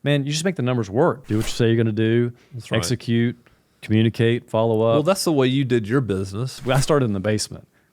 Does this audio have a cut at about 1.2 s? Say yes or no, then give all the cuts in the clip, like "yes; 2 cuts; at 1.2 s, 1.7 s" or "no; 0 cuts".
yes; 2 cuts; at 1.2 s, 6.6 s